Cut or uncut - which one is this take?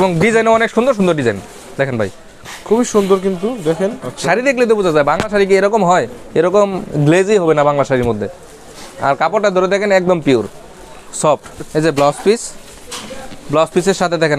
cut